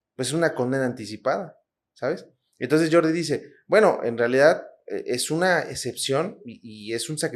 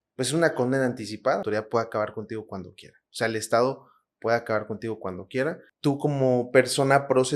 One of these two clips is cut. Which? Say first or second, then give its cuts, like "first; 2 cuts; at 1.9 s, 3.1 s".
second; 2 cuts; at 1.4 s, 5.7 s